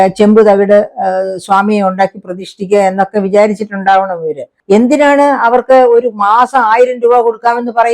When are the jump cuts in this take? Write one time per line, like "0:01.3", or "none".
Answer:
0:04.5